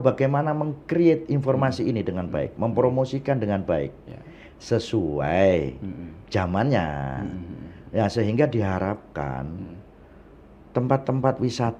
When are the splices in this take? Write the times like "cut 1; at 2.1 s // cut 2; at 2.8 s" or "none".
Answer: none